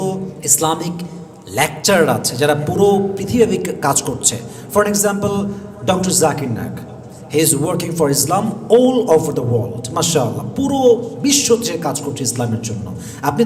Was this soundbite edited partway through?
no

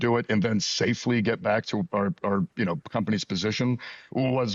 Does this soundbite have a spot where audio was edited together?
no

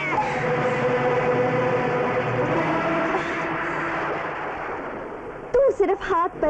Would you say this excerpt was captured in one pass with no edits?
yes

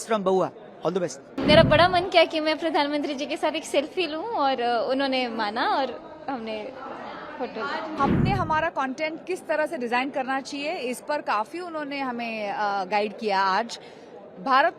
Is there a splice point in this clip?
yes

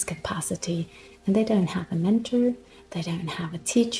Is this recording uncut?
yes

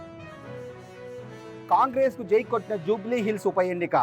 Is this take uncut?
no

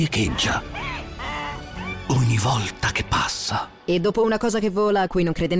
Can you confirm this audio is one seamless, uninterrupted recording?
no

